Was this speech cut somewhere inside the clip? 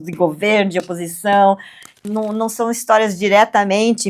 yes; 1 cut; at 2.0 s

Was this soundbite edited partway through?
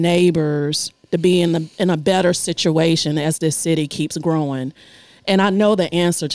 no; 0 cuts

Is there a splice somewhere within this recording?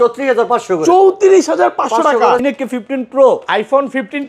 yes; 1 cut; at 2.4 s

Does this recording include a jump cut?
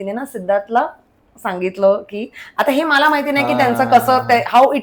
no; 0 cuts

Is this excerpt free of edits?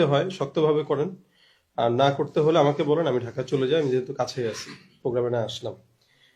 yes; 0 cuts

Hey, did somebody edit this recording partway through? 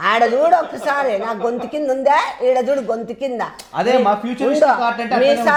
no; 0 cuts

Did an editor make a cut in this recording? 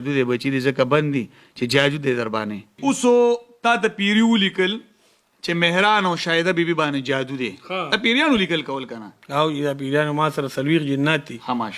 yes; 1 cut; at 2.8 s

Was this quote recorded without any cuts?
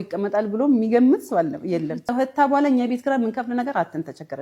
no; 1 cut; at 2.1 s

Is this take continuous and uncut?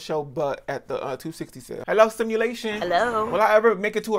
no; 1 cut; at 1.8 s

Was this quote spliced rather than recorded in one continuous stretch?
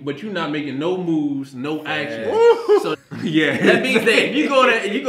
yes; 1 cut; at 2.9 s

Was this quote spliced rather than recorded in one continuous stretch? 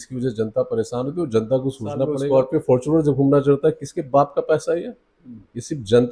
yes; 1 cut; at 2.2 s

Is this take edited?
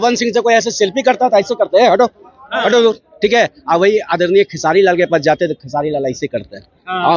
no; 0 cuts

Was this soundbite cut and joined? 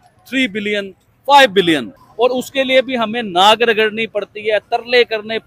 yes; 1 cut; at 2.0 s

